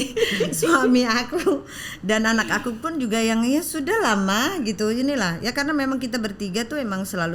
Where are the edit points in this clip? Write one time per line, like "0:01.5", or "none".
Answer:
none

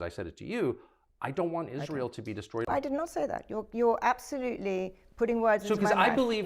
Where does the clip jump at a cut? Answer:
0:02.7

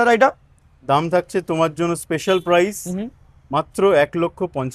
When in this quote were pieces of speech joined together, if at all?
none

